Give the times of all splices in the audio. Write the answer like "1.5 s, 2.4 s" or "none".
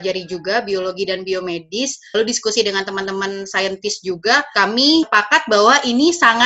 4.9 s